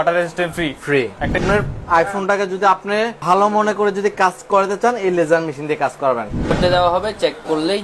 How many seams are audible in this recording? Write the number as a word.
three